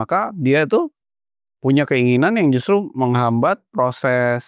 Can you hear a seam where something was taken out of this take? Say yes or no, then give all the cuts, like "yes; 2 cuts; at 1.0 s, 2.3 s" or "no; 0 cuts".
no; 0 cuts